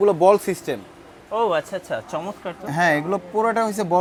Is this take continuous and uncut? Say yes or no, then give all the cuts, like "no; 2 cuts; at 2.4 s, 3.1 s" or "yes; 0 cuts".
yes; 0 cuts